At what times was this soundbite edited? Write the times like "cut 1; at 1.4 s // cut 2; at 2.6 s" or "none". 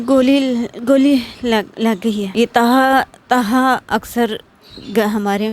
cut 1; at 2.3 s